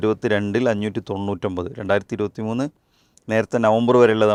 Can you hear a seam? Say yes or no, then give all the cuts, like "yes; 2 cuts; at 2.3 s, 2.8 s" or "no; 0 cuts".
no; 0 cuts